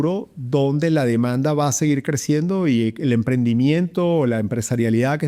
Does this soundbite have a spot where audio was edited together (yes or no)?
no